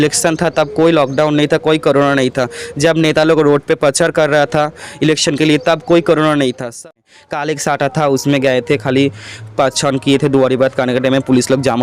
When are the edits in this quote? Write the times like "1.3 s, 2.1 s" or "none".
6.8 s